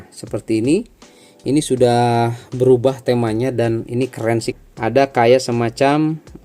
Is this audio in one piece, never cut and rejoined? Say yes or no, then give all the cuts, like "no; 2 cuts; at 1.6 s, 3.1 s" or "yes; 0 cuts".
no; 1 cut; at 4.5 s